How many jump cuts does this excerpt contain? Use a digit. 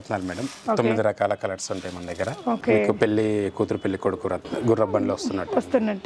1